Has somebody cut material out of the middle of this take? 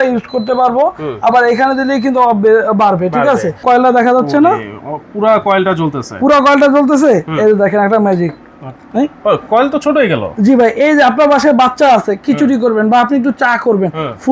yes; 1 cut; at 3.6 s

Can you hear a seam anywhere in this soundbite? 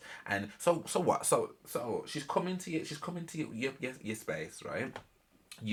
no; 0 cuts

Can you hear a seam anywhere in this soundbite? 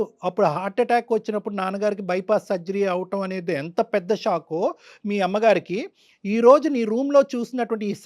no; 0 cuts

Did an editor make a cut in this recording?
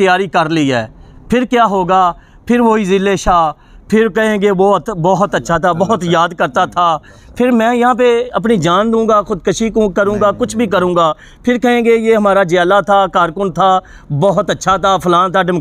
no; 0 cuts

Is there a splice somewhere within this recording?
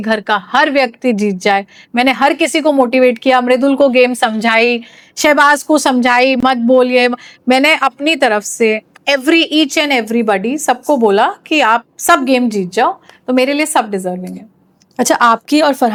no; 0 cuts

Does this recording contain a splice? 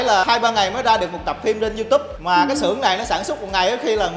no; 0 cuts

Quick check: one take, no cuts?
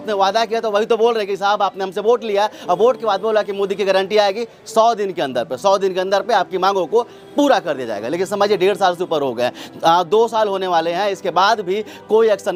yes; 0 cuts

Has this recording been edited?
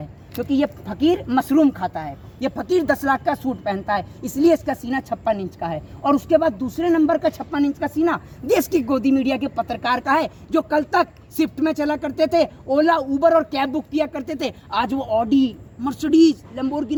no; 0 cuts

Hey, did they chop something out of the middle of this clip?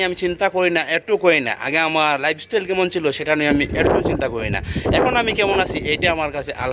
no; 0 cuts

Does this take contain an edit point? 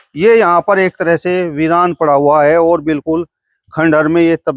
no; 0 cuts

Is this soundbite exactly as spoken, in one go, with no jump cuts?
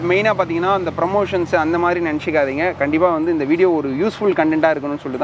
yes; 0 cuts

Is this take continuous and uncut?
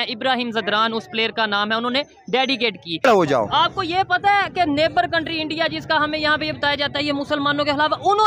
no; 1 cut; at 3.0 s

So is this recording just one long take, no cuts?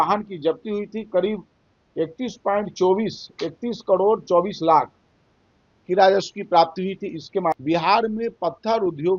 no; 1 cut; at 7.6 s

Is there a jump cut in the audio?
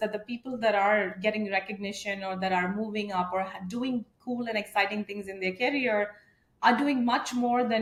no; 0 cuts

